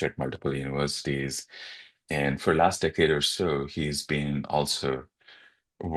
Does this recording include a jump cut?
no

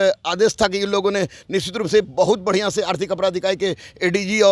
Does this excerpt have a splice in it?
no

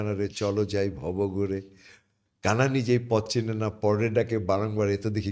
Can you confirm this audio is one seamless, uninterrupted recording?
yes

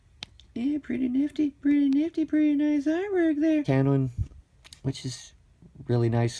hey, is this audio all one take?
yes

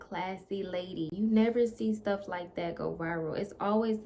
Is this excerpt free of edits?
no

